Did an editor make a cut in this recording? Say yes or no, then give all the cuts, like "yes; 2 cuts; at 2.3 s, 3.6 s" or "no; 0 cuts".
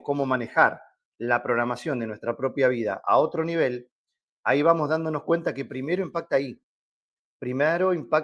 no; 0 cuts